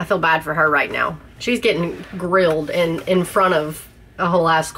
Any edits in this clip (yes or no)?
yes